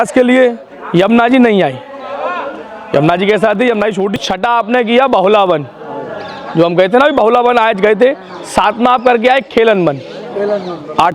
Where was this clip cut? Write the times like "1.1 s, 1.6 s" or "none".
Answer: 4.2 s